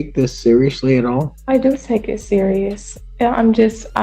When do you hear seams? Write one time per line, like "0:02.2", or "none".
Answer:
0:01.3